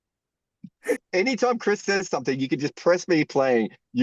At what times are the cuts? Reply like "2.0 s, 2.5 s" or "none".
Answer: 1.0 s